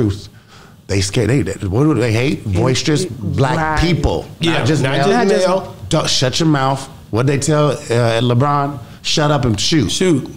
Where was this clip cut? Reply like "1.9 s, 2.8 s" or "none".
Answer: none